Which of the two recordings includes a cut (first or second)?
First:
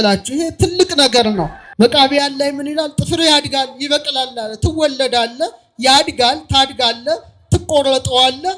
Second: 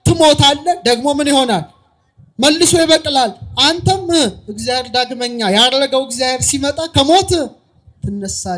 first